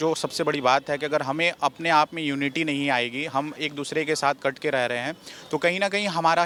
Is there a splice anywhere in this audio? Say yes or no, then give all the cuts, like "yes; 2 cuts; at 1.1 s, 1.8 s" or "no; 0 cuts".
no; 0 cuts